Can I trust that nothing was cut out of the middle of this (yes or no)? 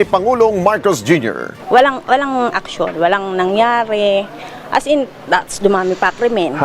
no